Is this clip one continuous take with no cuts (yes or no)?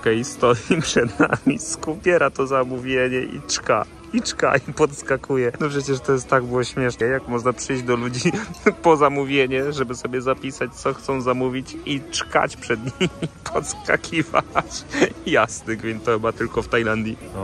yes